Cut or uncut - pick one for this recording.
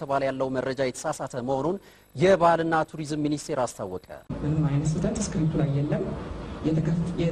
cut